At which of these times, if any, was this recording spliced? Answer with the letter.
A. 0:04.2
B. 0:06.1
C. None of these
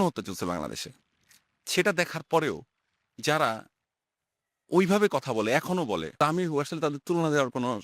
B